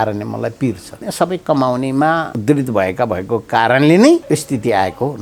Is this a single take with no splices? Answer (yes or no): no